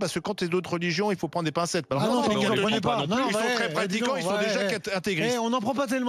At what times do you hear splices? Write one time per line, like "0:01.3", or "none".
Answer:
none